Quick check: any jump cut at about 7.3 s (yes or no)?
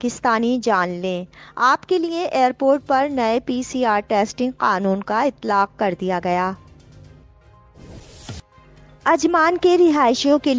yes